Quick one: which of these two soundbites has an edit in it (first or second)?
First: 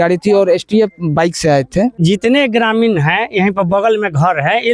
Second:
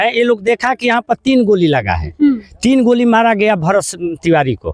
first